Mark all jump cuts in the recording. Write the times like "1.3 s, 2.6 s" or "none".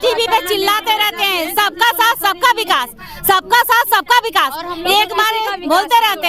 none